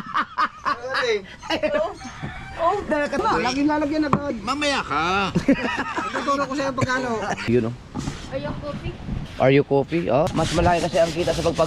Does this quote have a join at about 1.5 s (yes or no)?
no